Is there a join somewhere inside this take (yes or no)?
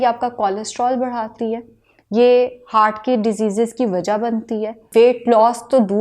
yes